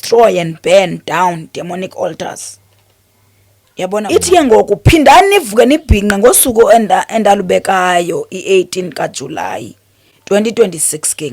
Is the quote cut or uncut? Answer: cut